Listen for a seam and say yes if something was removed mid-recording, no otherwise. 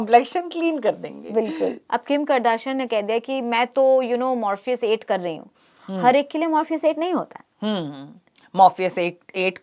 yes